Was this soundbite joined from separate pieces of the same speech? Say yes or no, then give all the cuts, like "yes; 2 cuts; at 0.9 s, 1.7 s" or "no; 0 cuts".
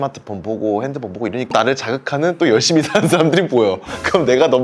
yes; 1 cut; at 1.5 s